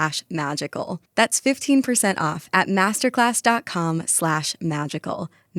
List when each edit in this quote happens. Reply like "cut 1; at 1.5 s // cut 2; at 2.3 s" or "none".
none